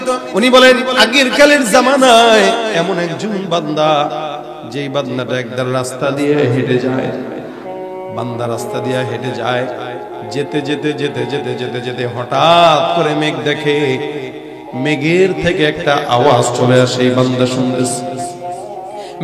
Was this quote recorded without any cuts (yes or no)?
yes